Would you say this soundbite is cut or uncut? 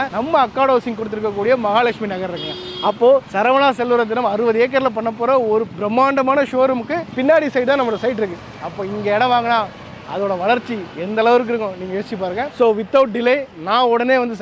uncut